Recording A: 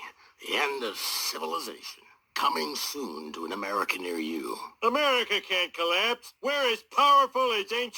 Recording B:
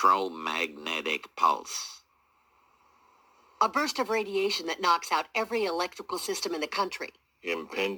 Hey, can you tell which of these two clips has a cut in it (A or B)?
A